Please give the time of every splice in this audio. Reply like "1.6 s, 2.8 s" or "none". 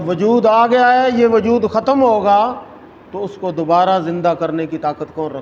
none